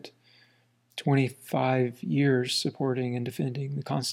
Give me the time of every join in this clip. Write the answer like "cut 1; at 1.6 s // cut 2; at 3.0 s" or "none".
none